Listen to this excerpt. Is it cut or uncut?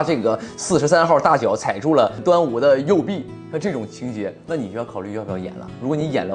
uncut